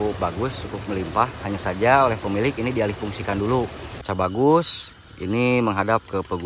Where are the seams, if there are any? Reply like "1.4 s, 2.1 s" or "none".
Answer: 4.0 s